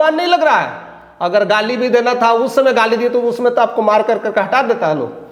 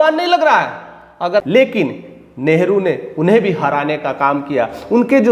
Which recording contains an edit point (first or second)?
second